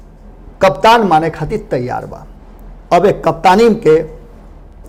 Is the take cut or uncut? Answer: uncut